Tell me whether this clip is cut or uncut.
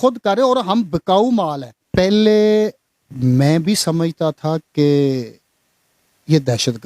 cut